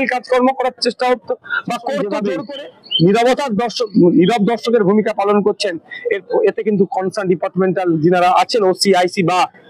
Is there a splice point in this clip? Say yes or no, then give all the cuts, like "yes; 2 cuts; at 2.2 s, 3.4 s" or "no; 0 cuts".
yes; 1 cut; at 2.2 s